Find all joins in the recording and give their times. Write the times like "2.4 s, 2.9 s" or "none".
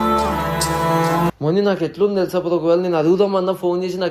1.3 s